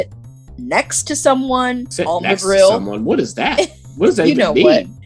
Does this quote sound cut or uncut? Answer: cut